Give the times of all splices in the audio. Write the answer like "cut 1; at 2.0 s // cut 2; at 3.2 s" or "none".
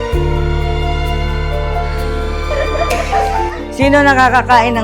cut 1; at 3.7 s